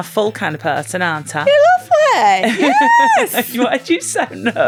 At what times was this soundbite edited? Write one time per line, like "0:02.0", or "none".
none